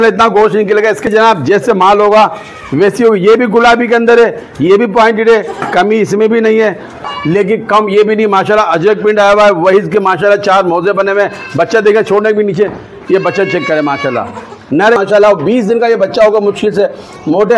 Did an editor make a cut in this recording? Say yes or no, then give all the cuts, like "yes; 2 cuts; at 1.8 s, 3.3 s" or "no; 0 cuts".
yes; 3 cuts; at 1.1 s, 7.0 s, 15.0 s